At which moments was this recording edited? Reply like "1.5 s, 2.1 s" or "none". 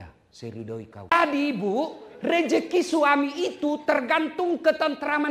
1.1 s